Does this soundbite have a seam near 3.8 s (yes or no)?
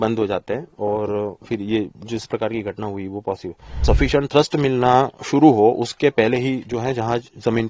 yes